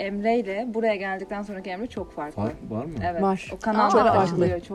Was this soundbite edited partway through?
no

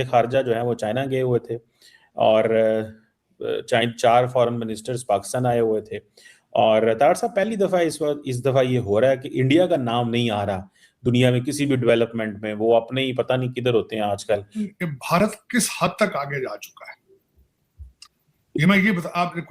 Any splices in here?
yes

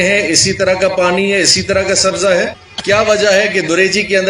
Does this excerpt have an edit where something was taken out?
yes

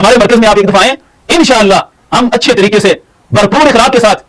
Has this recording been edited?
no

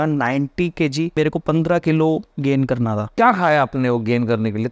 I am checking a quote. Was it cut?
yes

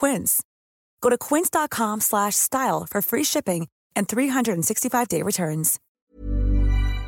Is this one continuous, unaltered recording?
no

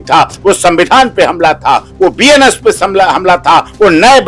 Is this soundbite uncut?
yes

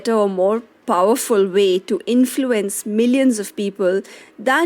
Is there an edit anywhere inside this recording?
no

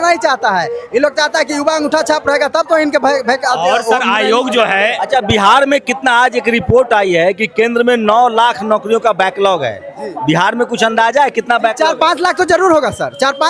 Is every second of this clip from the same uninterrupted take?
yes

